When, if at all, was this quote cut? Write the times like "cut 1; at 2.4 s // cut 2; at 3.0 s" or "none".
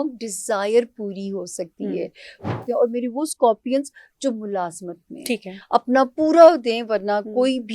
cut 1; at 2.5 s